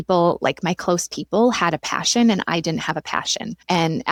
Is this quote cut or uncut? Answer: uncut